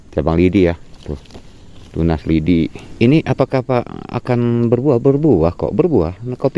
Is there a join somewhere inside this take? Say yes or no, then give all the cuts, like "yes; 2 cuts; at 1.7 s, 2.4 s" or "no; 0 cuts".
yes; 1 cut; at 2.8 s